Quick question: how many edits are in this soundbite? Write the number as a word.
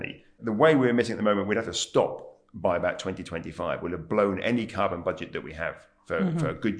zero